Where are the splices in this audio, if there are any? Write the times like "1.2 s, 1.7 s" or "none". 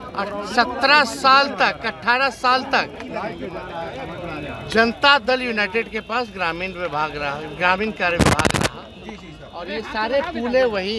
none